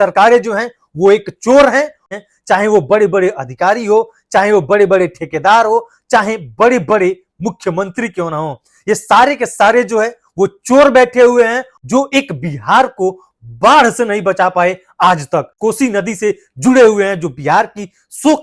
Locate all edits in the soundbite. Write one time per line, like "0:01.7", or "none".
0:02.0
0:11.7
0:15.5